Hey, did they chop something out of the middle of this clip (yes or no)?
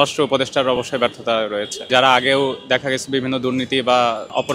yes